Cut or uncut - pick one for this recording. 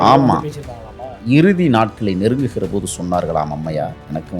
cut